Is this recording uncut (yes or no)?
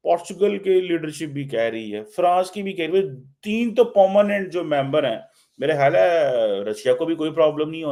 yes